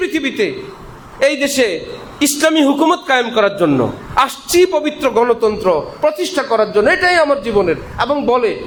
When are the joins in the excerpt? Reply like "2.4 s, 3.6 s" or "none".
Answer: none